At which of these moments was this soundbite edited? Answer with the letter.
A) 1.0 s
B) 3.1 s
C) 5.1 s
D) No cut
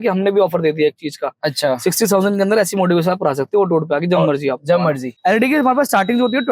C